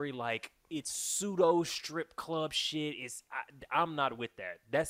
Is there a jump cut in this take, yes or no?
no